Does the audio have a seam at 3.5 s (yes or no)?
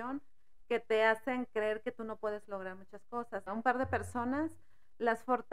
yes